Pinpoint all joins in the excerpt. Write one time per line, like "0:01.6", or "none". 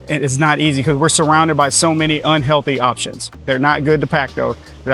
0:03.3